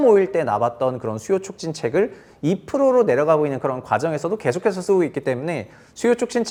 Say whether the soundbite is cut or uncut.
uncut